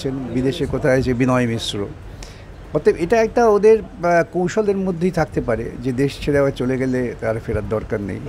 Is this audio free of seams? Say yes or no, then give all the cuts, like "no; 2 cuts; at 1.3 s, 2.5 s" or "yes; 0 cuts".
yes; 0 cuts